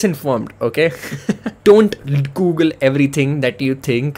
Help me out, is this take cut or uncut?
cut